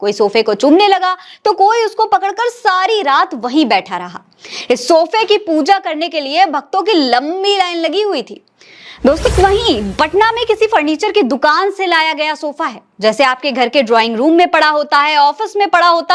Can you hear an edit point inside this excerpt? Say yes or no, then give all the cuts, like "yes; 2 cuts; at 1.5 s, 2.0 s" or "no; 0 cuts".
yes; 1 cut; at 9.2 s